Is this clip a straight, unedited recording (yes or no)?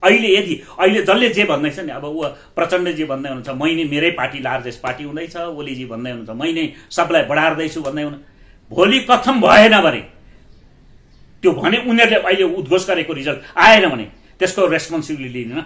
yes